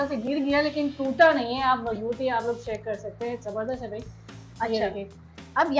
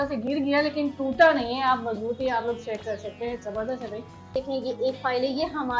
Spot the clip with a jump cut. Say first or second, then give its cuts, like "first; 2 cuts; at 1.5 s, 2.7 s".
second; 1 cut; at 4.4 s